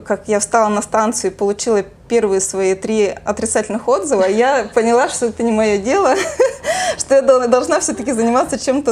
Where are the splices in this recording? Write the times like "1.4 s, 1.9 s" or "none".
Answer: none